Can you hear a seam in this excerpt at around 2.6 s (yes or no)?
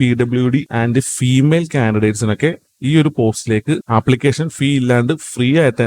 no